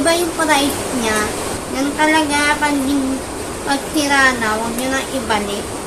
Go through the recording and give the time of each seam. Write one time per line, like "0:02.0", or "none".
0:01.4

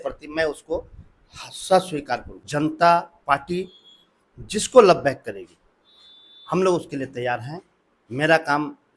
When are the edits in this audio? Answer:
0:02.3

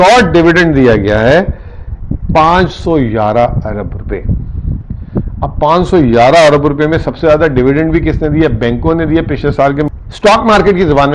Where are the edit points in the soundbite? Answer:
0:09.9

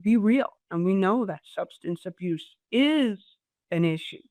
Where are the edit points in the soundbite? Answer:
none

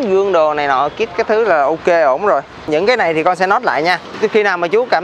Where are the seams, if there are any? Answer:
0:02.7

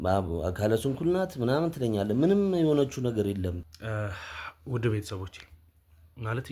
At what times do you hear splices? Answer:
0:03.6

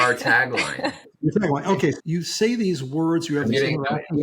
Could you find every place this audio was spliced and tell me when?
0:01.1
0:02.0

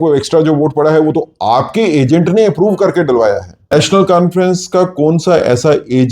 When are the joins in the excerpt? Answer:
0:03.7

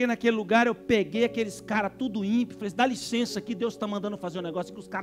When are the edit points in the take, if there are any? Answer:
none

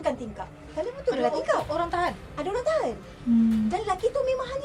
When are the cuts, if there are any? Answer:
none

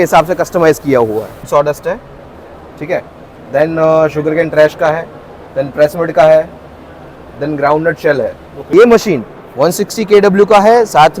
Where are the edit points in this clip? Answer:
0:01.5
0:08.5

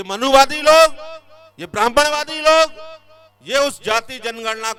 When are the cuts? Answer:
none

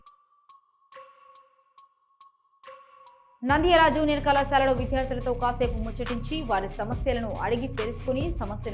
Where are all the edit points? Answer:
none

